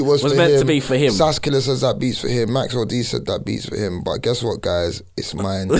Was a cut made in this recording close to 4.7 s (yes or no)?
no